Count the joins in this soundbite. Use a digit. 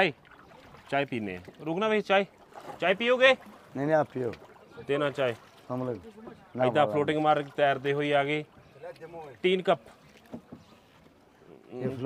0